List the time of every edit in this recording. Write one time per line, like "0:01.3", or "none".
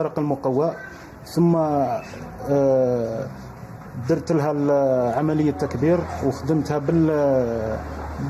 0:05.0